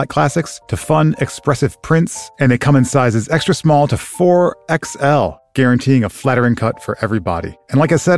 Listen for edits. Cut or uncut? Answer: uncut